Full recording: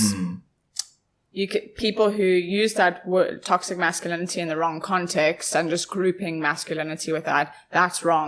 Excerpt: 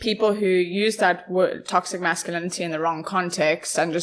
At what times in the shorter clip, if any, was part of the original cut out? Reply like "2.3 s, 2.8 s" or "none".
none

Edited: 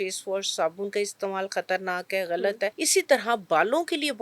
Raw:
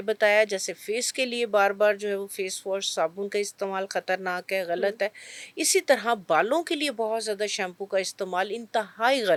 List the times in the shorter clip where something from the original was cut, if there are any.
2.8 s

